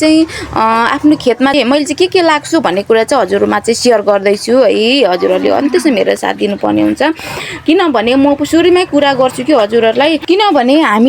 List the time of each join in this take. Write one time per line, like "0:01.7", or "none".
0:01.5
0:10.2